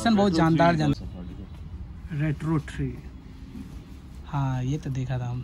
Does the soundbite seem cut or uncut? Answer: cut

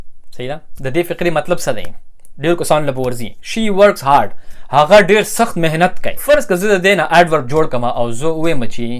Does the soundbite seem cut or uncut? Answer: cut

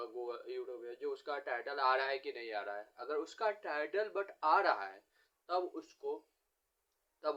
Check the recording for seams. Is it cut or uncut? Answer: uncut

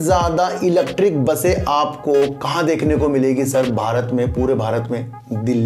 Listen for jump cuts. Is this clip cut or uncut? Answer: uncut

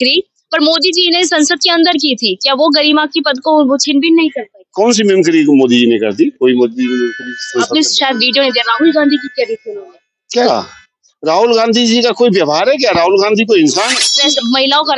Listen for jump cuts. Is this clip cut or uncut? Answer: cut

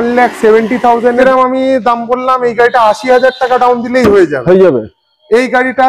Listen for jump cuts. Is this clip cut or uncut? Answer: cut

